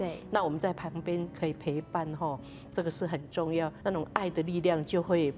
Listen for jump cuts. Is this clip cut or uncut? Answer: cut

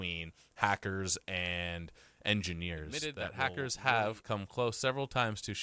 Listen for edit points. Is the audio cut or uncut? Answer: cut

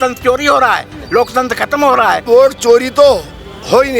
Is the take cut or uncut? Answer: cut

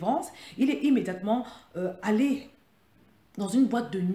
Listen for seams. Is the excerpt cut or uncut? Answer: uncut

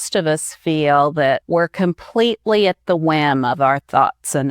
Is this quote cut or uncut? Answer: cut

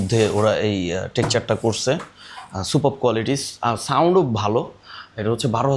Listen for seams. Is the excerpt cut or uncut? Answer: uncut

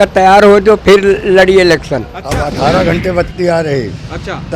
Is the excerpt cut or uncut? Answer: cut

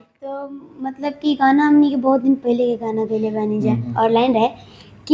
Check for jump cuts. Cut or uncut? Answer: cut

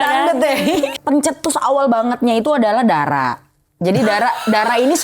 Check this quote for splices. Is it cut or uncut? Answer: cut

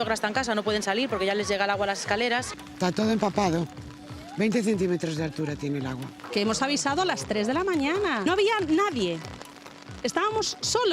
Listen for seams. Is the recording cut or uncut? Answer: cut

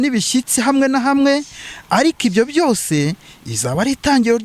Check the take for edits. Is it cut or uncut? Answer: uncut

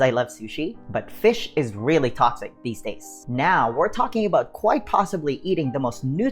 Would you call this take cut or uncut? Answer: cut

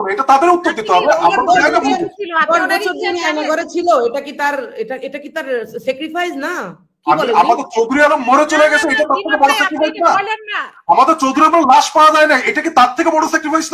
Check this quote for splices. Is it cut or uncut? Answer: uncut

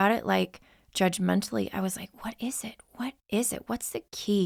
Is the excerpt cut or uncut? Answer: uncut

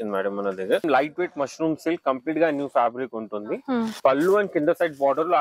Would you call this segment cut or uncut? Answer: cut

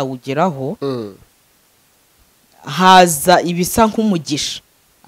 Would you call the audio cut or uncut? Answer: uncut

